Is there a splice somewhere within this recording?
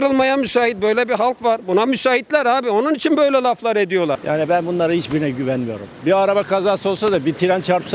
yes; 1 cut; at 4.1 s

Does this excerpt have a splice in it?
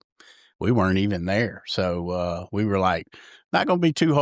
no; 0 cuts

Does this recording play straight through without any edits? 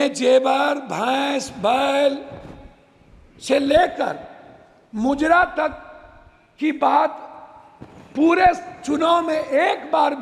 yes; 0 cuts

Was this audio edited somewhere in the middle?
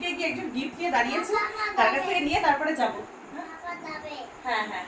no; 0 cuts

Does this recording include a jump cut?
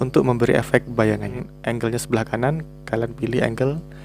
yes; 1 cut; at 1.4 s

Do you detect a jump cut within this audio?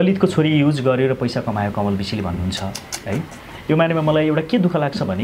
no; 0 cuts

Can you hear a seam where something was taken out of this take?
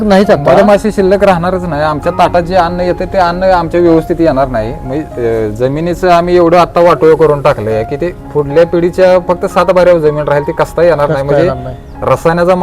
no; 0 cuts

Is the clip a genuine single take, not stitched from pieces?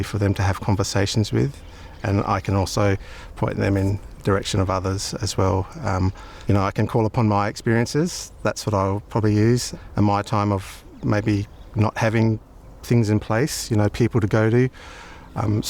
yes; 0 cuts

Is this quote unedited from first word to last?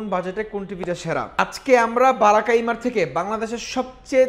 no; 1 cut; at 1.3 s

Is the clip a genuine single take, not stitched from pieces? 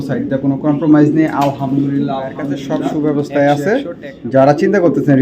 no; 1 cut; at 2.9 s

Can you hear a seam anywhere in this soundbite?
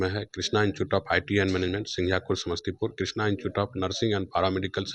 no; 0 cuts

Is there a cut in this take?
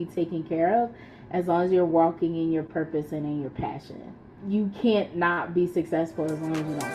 yes; 1 cut; at 4.3 s

